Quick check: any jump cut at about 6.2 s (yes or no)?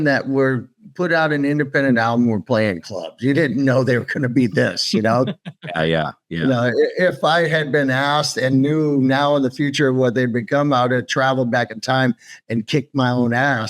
no